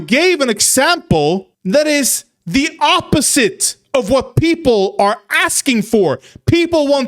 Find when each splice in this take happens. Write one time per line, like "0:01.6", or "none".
0:01.5